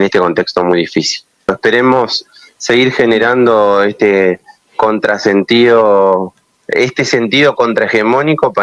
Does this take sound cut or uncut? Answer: cut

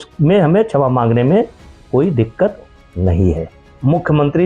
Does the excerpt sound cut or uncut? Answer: cut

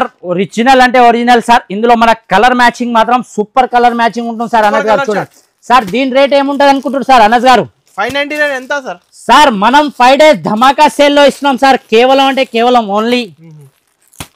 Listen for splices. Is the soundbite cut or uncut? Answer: uncut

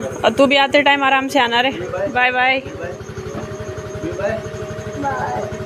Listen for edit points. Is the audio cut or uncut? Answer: uncut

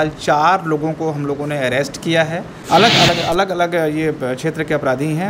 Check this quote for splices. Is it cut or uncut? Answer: cut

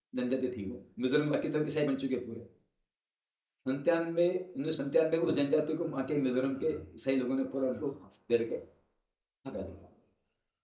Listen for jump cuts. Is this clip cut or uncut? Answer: uncut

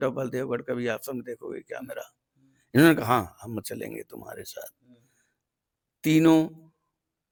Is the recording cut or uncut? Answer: uncut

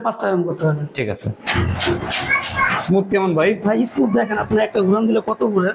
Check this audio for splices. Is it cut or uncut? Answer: cut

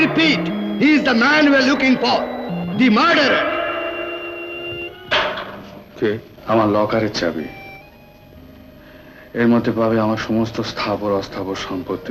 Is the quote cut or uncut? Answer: cut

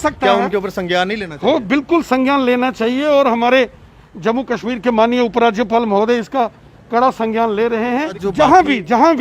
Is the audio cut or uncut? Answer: cut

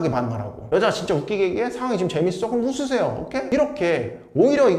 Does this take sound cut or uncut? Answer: cut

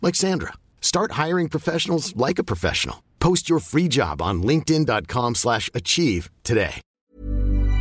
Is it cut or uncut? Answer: cut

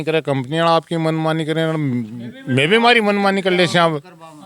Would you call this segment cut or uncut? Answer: uncut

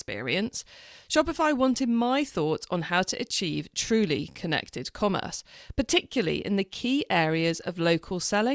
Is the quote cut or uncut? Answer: uncut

